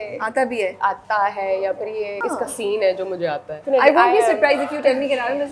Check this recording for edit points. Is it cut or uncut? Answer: cut